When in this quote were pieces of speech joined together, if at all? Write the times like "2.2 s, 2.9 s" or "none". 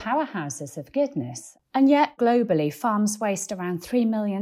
1.4 s, 2.1 s